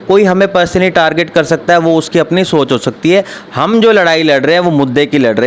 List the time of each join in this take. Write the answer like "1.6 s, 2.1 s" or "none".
none